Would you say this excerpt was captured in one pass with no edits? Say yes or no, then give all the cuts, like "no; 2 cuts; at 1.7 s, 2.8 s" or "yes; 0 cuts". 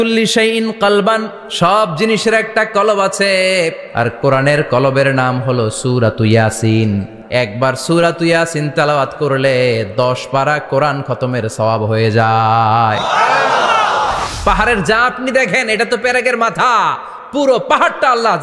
no; 4 cuts; at 1.4 s, 3.8 s, 7.1 s, 14.3 s